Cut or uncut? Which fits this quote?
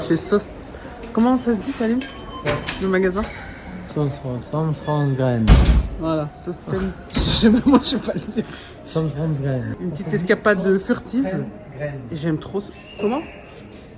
uncut